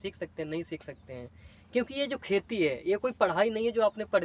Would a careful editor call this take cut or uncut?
uncut